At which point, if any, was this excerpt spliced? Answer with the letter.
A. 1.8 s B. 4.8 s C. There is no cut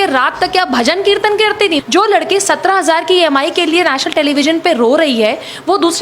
A